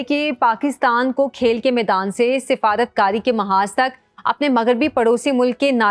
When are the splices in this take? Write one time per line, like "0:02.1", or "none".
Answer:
none